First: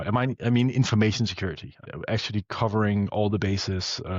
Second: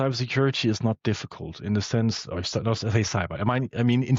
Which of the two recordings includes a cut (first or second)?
first